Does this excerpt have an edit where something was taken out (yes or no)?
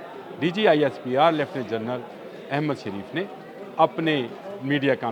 no